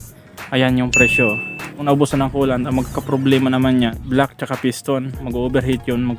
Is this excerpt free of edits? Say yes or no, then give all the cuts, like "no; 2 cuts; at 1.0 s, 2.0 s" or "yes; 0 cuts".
no; 2 cuts; at 1.8 s, 5.2 s